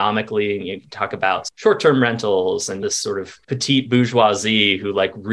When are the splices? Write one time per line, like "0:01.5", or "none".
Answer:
0:01.5
0:02.9